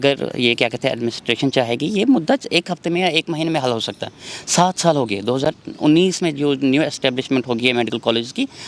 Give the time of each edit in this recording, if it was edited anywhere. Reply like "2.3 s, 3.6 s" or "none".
none